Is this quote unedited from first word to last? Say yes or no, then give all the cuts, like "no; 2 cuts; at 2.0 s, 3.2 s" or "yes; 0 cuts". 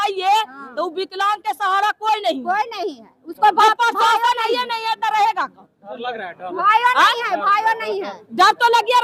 yes; 0 cuts